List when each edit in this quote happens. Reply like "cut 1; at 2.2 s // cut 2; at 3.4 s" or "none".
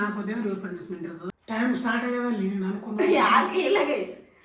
cut 1; at 1.2 s